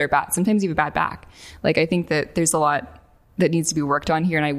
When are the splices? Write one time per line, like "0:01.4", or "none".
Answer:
none